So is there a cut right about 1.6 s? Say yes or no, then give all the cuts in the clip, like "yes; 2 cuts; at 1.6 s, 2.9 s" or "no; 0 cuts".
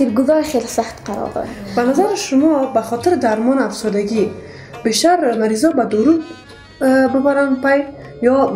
yes; 1 cut; at 1.6 s